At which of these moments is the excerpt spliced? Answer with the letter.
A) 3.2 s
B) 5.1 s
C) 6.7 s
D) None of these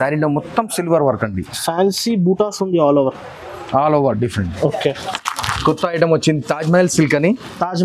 B